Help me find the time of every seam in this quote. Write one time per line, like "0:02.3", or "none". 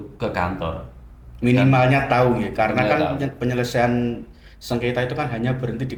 none